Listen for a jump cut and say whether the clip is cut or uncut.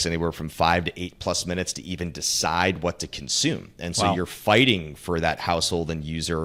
uncut